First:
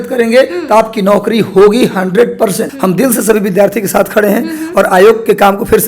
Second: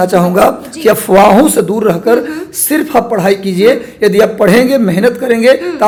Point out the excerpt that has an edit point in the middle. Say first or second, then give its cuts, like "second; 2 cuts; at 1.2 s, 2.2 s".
first; 1 cut; at 2.7 s